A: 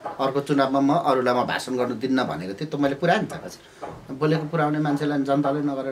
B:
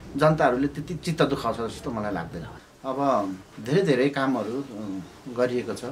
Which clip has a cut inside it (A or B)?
B